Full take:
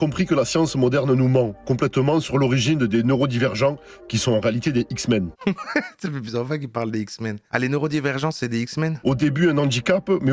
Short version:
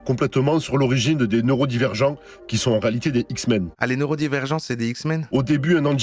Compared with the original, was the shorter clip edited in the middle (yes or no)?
yes